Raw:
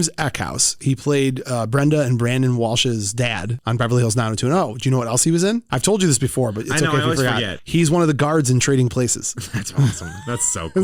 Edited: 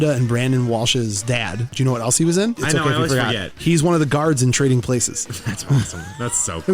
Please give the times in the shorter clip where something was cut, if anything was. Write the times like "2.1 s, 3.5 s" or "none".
1.7 s, 2.6 s